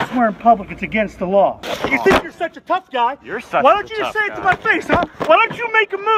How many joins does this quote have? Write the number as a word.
one